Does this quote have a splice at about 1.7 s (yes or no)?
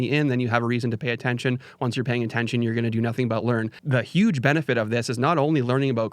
no